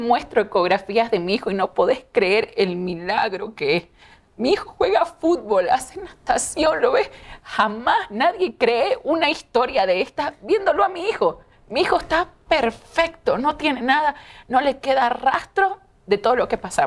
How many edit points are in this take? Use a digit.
0